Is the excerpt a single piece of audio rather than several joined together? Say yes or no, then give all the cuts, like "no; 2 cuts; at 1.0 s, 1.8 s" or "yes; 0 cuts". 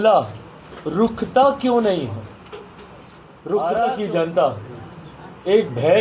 no; 1 cut; at 3.6 s